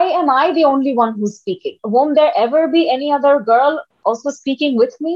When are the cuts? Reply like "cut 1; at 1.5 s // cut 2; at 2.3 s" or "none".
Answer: cut 1; at 1.7 s